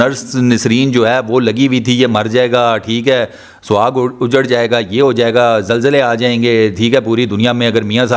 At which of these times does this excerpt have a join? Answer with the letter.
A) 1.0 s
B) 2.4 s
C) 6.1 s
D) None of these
D